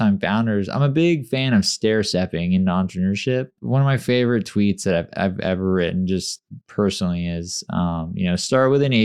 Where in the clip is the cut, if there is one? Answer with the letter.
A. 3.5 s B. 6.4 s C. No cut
A